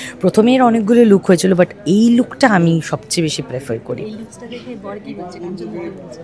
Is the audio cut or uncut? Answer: uncut